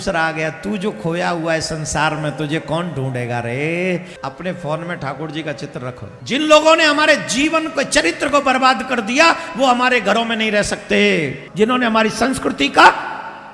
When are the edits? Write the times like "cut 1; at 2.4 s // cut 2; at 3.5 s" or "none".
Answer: cut 1; at 4.1 s // cut 2; at 6.1 s // cut 3; at 11.4 s